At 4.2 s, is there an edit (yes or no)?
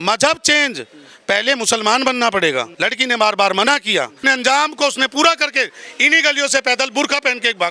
yes